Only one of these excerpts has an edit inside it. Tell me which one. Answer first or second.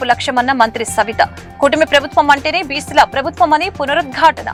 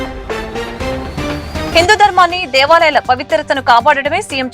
second